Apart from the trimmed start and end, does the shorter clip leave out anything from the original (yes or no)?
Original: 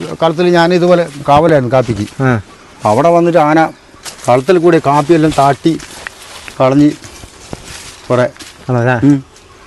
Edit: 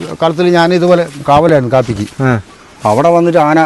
no